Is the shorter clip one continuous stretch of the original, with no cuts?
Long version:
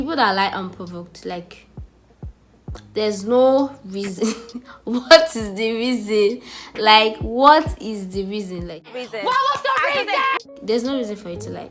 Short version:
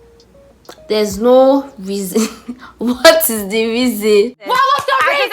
no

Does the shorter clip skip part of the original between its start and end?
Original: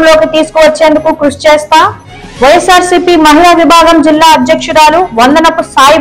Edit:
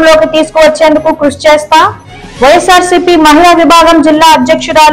no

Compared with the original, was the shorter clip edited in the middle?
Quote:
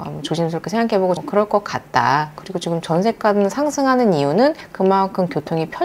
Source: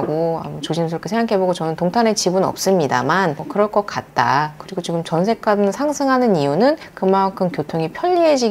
yes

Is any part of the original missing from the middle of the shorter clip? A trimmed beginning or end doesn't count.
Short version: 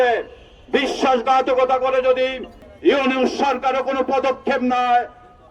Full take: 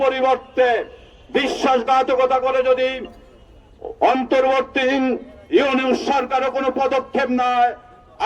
yes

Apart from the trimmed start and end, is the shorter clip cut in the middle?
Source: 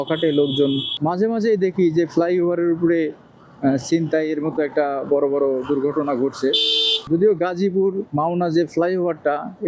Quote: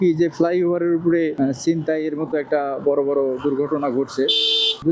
yes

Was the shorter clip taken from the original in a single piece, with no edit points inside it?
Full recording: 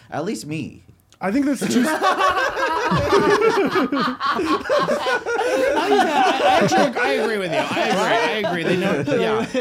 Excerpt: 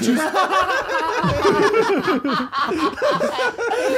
yes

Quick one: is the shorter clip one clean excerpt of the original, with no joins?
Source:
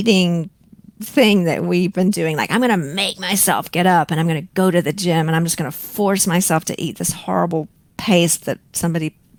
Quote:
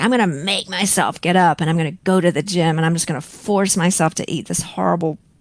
yes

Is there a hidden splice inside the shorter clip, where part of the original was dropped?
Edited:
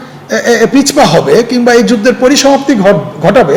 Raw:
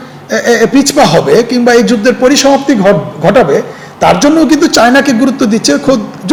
no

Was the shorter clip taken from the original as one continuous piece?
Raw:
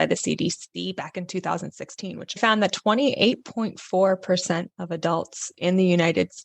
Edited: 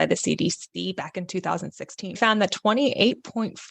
no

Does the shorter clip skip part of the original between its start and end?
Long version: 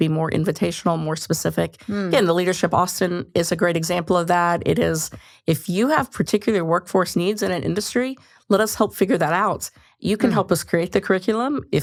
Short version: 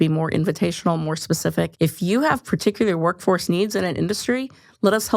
yes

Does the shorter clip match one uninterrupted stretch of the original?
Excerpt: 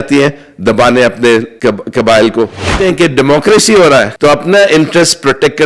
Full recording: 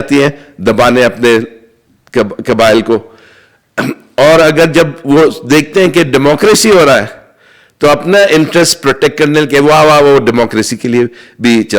no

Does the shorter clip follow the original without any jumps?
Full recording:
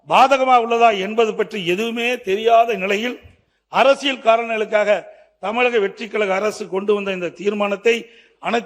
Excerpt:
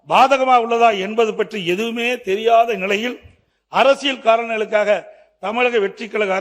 yes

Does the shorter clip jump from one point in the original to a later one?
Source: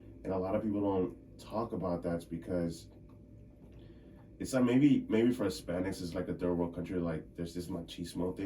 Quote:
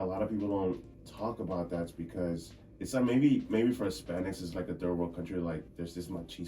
yes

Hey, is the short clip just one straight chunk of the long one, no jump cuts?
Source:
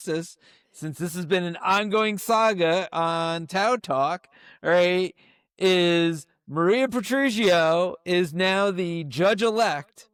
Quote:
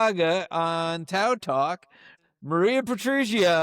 no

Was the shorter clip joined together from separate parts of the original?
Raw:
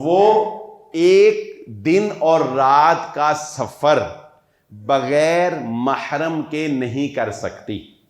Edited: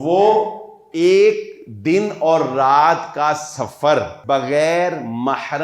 yes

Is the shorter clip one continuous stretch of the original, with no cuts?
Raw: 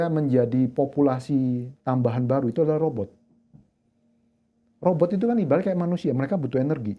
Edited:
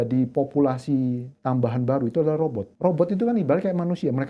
no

